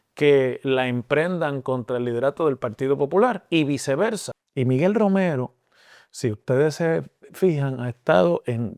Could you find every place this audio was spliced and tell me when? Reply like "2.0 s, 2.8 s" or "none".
4.3 s